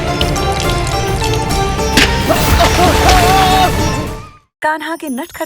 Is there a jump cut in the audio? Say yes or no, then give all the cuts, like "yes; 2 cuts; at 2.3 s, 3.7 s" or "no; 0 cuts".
yes; 1 cut; at 4.1 s